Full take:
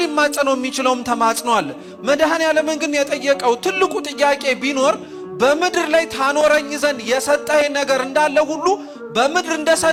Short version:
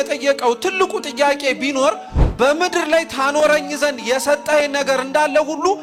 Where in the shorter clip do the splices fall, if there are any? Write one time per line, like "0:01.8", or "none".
none